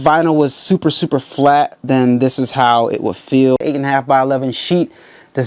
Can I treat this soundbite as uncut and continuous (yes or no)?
no